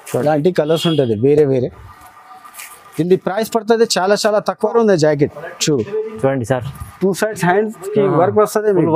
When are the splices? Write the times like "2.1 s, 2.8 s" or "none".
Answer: 4.6 s